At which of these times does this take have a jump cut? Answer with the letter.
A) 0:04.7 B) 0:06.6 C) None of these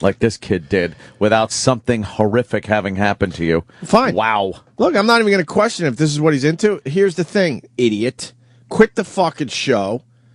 B